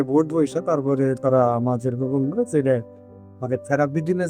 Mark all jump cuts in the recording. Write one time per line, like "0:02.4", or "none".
none